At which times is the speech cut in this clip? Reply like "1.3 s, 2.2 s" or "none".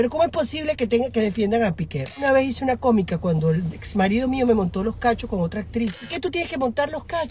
2.2 s, 6.1 s